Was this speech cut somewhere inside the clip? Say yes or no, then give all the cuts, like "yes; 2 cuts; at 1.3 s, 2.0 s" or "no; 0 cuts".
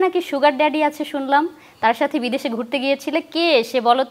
no; 0 cuts